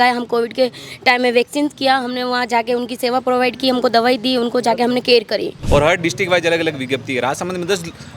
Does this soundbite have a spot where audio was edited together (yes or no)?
yes